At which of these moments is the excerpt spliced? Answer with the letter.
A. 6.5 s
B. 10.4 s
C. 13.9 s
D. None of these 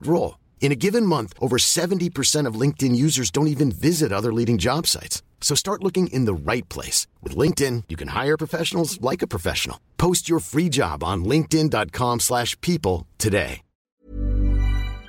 C